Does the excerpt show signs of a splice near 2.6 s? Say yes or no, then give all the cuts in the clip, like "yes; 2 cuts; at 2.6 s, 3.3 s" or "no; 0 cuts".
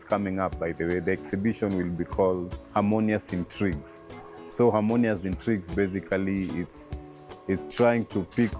yes; 1 cut; at 2.6 s